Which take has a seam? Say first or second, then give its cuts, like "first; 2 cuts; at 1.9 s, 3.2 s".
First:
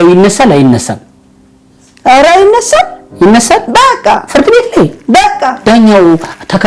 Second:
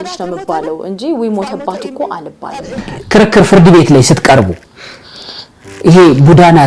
second; 1 cut; at 2.8 s